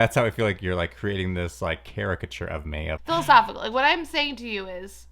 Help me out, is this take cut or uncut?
cut